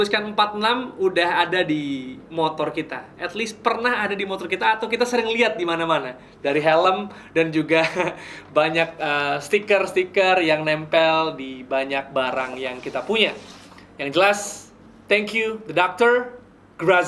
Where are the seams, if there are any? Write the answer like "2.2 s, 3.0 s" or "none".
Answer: none